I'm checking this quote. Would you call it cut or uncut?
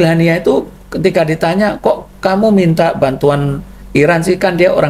uncut